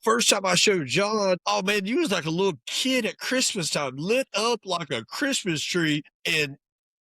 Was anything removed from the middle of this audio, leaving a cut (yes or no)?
yes